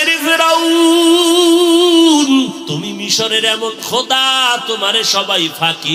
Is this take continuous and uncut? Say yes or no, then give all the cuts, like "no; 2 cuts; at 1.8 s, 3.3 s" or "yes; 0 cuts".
no; 1 cut; at 2.7 s